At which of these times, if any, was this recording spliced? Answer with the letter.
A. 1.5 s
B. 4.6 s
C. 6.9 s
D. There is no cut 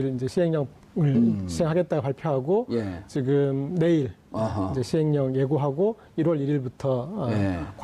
A